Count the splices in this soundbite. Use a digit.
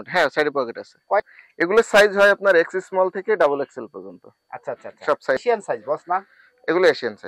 2